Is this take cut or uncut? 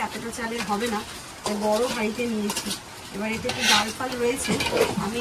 uncut